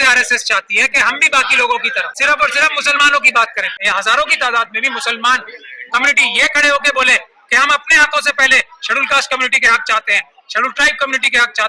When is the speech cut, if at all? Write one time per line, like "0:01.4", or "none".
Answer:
0:02.2
0:03.7